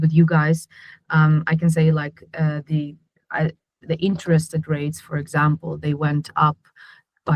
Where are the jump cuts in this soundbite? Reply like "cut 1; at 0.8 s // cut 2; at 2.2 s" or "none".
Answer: none